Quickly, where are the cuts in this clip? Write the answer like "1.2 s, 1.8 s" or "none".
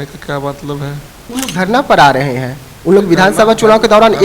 1.2 s